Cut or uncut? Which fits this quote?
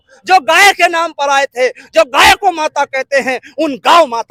uncut